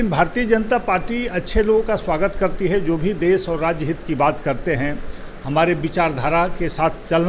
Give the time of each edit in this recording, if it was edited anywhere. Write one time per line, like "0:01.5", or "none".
none